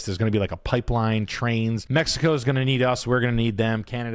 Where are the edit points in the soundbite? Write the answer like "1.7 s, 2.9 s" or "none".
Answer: 1.8 s